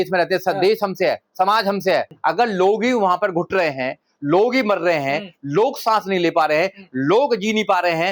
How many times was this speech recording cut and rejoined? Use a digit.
1